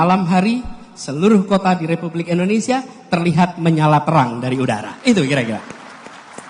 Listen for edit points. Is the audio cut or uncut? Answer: uncut